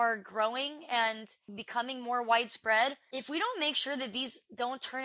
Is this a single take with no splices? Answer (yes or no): no